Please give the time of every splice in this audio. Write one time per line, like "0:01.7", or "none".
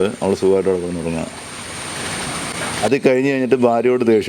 0:02.8